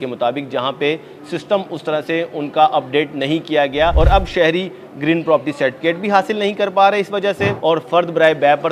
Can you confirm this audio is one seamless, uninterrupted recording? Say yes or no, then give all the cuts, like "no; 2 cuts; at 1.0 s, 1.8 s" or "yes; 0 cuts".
no; 2 cuts; at 3.9 s, 7.5 s